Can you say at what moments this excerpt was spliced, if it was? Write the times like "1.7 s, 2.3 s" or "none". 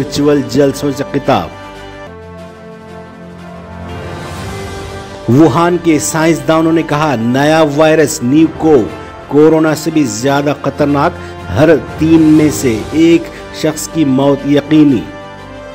none